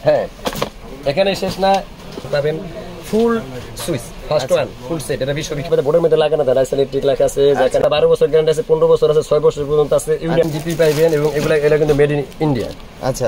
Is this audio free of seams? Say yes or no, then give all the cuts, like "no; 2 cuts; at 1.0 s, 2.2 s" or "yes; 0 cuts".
no; 4 cuts; at 2.3 s, 5.7 s, 7.9 s, 10.4 s